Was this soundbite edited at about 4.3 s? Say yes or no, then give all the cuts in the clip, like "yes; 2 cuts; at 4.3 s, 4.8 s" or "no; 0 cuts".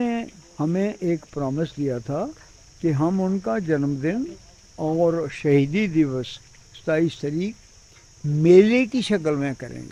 no; 0 cuts